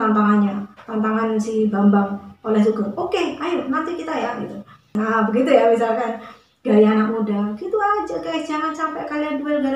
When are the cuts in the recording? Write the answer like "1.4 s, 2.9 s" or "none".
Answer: 4.9 s